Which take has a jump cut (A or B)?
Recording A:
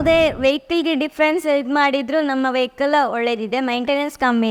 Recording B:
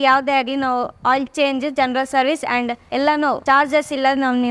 B